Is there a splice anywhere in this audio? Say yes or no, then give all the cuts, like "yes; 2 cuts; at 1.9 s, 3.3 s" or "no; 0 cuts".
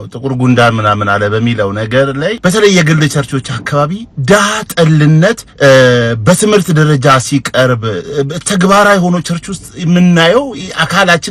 yes; 2 cuts; at 2.4 s, 5.5 s